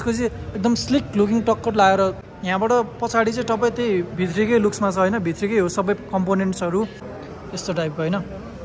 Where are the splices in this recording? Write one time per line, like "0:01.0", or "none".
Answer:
0:02.3
0:07.1